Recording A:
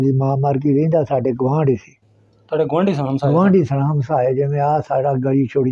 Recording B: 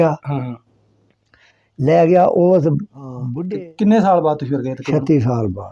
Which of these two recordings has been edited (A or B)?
B